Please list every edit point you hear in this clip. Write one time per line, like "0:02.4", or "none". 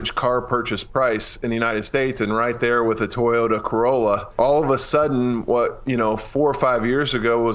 0:04.3